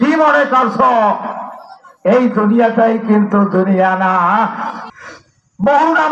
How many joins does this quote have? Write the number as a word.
one